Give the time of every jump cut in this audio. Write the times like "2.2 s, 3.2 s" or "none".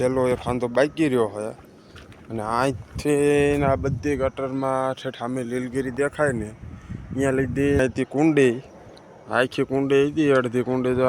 7.8 s